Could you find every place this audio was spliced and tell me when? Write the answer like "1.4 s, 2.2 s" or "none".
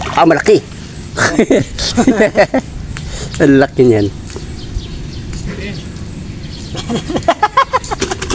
none